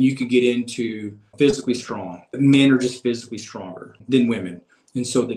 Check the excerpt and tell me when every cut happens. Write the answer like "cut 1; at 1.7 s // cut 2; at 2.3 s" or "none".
cut 1; at 1.3 s // cut 2; at 2.3 s // cut 3; at 4.0 s

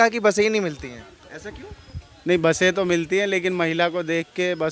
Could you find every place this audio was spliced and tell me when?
none

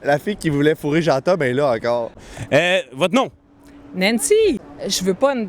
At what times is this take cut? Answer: cut 1; at 4.6 s

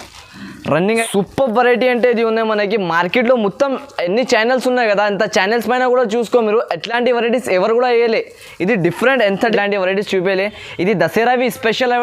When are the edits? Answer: cut 1; at 1.0 s // cut 2; at 9.5 s

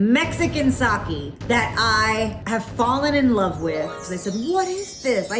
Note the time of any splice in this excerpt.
cut 1; at 1.4 s // cut 2; at 2.4 s // cut 3; at 4.1 s

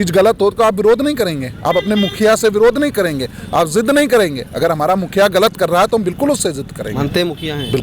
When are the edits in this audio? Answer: none

